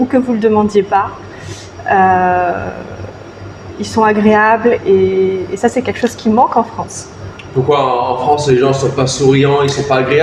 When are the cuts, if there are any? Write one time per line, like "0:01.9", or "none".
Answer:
none